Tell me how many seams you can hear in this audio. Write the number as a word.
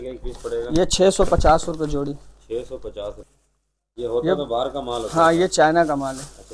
one